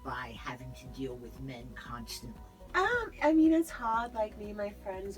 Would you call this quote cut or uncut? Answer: cut